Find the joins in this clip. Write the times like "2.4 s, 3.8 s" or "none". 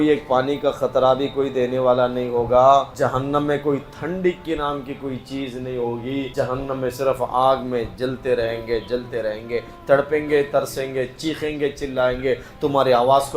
2.9 s, 6.3 s